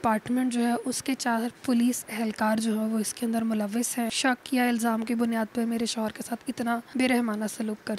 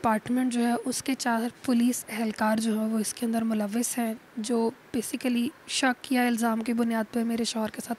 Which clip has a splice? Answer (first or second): first